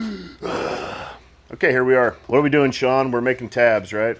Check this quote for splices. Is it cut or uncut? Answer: uncut